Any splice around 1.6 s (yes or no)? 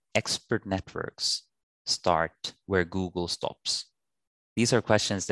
no